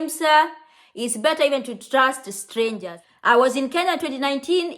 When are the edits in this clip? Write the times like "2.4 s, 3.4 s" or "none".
2.9 s

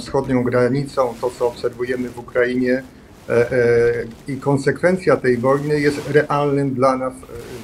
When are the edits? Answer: none

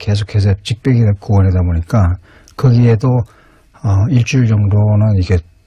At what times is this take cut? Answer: none

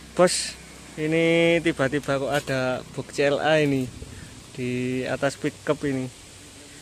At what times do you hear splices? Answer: none

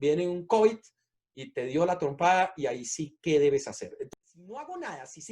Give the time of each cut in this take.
4.0 s

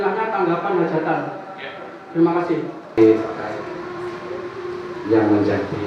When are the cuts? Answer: 3.0 s

